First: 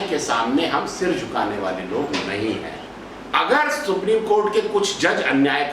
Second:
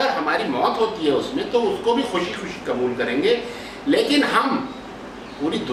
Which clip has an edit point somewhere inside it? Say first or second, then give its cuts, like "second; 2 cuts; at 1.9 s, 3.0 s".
first; 1 cut; at 2.9 s